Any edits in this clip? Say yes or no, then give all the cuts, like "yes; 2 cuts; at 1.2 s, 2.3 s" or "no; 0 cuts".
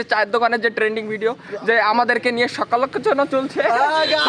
no; 0 cuts